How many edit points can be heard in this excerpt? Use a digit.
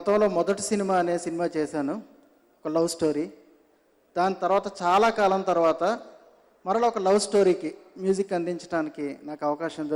0